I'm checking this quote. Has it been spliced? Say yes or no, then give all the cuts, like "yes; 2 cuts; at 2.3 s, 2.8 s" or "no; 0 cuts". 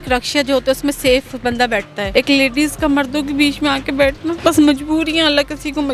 yes; 2 cuts; at 2.0 s, 4.4 s